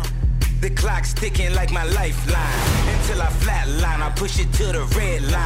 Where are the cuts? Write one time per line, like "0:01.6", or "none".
none